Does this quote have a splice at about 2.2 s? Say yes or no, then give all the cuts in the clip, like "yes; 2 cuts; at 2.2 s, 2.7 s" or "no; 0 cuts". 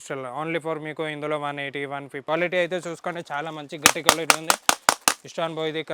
yes; 1 cut; at 2.2 s